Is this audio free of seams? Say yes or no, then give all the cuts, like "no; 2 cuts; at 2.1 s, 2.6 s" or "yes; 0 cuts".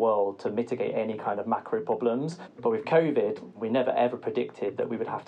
no; 2 cuts; at 2.4 s, 3.5 s